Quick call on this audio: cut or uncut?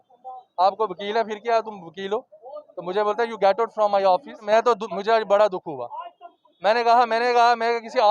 cut